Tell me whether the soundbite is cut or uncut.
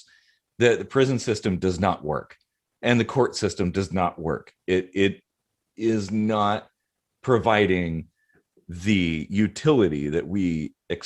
uncut